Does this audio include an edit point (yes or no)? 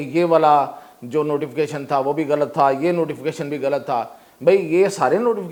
no